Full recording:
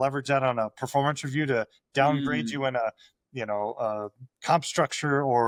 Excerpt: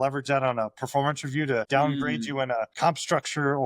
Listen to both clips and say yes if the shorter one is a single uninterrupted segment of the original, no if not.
no